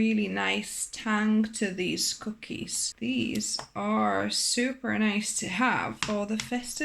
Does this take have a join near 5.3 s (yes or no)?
no